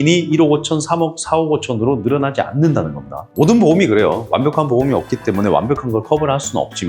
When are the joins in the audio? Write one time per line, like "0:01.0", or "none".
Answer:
0:03.3